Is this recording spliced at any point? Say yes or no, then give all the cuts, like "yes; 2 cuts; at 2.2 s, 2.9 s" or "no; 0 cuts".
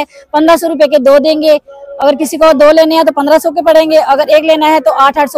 no; 0 cuts